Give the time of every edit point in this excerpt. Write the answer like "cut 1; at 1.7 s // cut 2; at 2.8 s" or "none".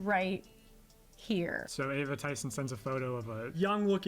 cut 1; at 1.6 s

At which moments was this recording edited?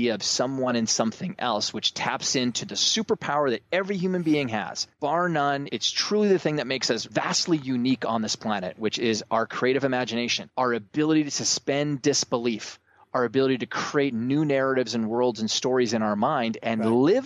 cut 1; at 4.8 s // cut 2; at 5.7 s // cut 3; at 7.0 s // cut 4; at 10.4 s

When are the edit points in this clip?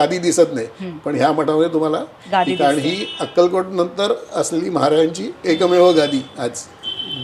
none

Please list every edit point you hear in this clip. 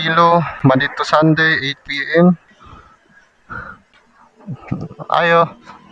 none

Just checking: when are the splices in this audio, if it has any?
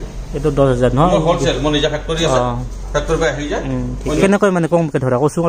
cut 1; at 4.2 s

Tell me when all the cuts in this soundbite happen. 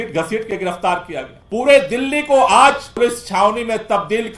cut 1; at 1.4 s // cut 2; at 3.0 s

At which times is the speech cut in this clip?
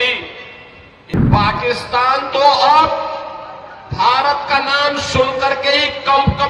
cut 1; at 0.9 s

